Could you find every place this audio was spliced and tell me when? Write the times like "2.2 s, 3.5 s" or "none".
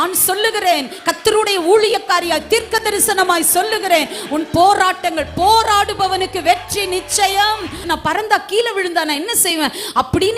7.8 s